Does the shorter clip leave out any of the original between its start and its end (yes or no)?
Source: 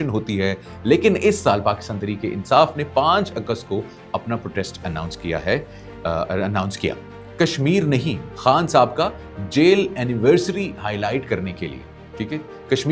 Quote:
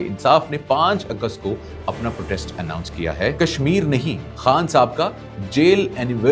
yes